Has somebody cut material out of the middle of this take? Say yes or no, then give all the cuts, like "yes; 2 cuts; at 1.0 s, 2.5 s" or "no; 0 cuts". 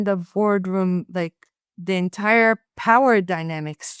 no; 0 cuts